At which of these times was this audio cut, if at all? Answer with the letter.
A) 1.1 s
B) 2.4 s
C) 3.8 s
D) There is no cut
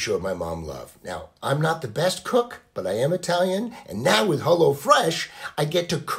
D